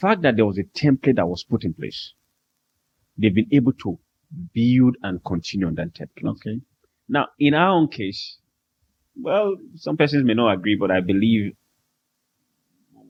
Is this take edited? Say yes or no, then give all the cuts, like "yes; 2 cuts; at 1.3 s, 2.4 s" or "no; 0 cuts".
no; 0 cuts